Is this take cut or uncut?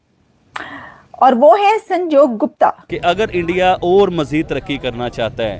cut